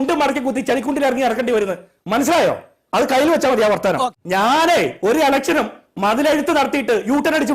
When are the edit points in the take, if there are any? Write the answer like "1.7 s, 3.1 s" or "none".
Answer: 4.2 s